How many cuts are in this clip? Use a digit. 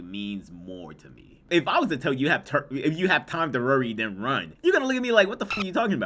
1